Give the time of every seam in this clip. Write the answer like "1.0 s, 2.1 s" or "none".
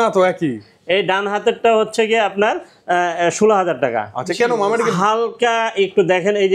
none